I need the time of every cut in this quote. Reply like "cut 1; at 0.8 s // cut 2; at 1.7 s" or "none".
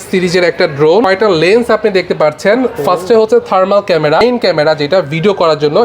cut 1; at 1.0 s // cut 2; at 4.2 s